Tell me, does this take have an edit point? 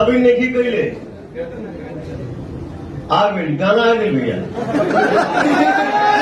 no; 0 cuts

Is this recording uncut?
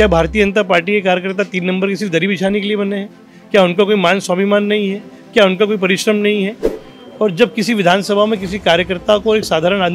no; 1 cut; at 6.7 s

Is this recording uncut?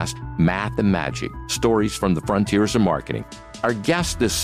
yes; 0 cuts

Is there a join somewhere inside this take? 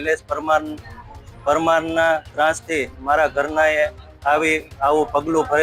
no; 0 cuts

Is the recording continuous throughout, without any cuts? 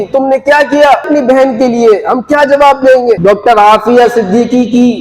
no; 2 cuts; at 1.1 s, 3.2 s

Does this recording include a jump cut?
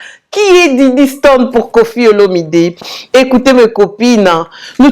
no; 0 cuts

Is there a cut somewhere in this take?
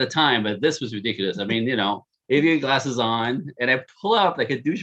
yes; 1 cut; at 2.1 s

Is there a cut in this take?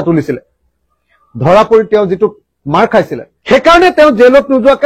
yes; 1 cut; at 3.3 s

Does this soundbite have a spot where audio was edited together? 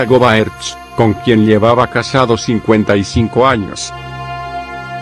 yes; 1 cut; at 3.8 s

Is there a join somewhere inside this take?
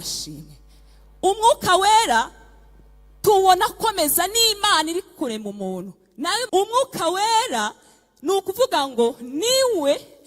yes; 1 cut; at 6.5 s

